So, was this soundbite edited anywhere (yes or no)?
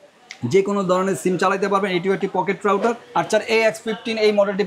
yes